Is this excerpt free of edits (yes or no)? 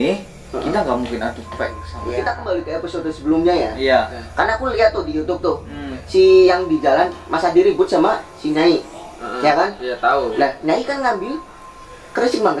no